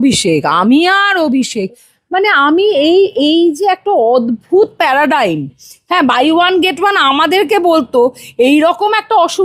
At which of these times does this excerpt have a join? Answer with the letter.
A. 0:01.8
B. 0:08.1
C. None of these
C